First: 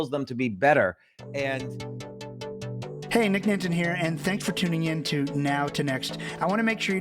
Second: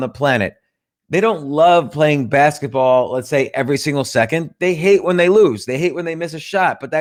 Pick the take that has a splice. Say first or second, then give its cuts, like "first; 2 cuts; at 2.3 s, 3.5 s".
first; 2 cuts; at 1.7 s, 3.1 s